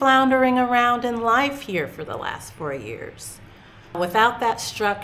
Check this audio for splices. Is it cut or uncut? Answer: cut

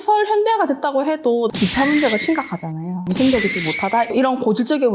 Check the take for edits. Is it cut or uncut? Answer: cut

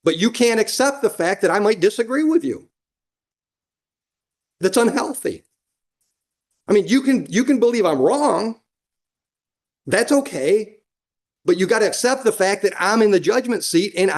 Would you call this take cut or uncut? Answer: uncut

